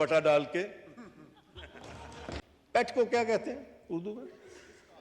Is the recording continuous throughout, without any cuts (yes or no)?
no